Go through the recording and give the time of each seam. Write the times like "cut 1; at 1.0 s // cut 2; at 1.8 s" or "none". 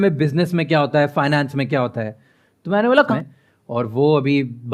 cut 1; at 3.1 s